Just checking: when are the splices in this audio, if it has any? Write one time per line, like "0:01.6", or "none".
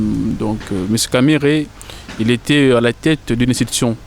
none

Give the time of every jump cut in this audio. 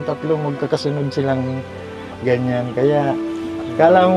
none

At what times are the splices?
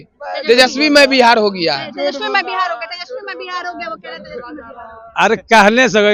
none

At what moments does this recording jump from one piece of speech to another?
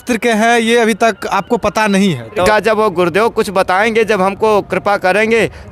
0:02.5

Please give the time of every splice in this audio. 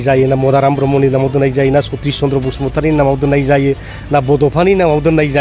none

